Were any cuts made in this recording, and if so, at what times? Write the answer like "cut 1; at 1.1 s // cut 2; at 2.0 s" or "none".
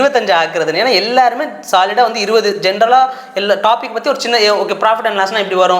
none